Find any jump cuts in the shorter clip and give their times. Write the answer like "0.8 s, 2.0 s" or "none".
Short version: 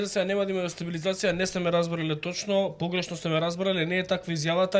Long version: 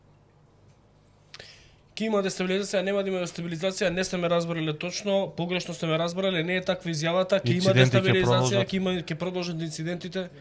none